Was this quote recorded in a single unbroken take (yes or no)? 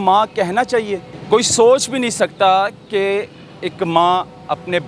no